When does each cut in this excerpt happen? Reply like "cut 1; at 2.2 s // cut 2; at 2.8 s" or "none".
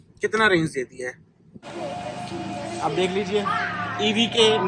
cut 1; at 1.7 s